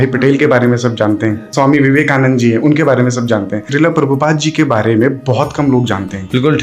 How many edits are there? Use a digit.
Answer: 0